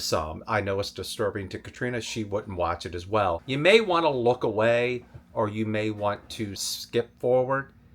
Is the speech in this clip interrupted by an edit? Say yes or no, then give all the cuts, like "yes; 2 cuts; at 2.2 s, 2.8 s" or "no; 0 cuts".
yes; 2 cuts; at 3.4 s, 6.7 s